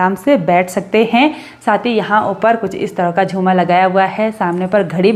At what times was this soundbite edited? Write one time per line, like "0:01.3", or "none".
none